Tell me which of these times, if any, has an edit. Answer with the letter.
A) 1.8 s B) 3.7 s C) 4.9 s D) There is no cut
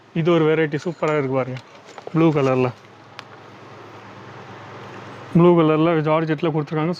D